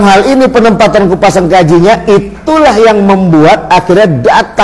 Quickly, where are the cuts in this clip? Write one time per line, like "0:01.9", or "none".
none